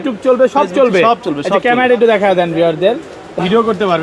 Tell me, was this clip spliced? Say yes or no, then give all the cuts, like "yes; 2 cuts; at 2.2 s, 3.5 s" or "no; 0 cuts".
no; 0 cuts